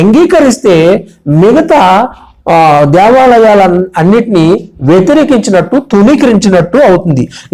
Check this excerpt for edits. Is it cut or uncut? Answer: uncut